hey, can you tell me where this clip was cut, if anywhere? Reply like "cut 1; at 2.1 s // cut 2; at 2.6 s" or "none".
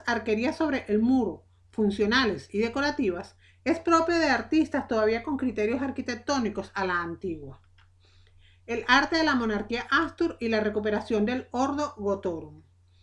none